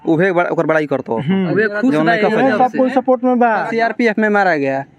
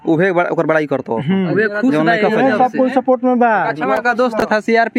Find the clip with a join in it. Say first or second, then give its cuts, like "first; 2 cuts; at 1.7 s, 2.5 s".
first; 1 cut; at 3.7 s